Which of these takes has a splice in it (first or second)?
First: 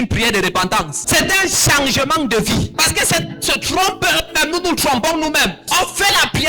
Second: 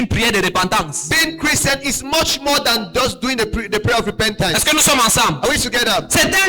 first